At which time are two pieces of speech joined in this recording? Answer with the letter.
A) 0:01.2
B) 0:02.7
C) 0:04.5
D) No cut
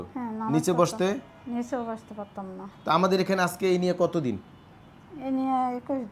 B